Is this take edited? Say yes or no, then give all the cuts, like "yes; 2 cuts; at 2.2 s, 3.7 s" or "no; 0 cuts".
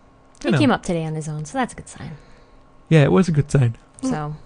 no; 0 cuts